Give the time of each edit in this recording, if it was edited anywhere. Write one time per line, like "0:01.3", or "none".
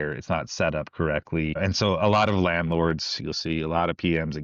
0:01.6